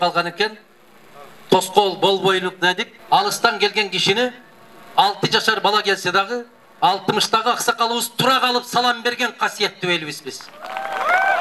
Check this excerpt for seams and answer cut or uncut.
cut